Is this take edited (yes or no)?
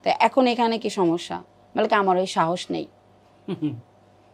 no